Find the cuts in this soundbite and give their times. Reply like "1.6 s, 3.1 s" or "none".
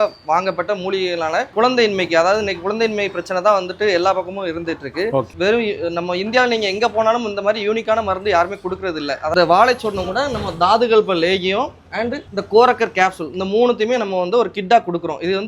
1.5 s, 5.3 s, 9.3 s